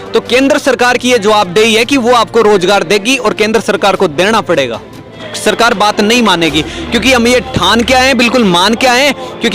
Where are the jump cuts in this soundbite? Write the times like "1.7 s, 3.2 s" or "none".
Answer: 5.2 s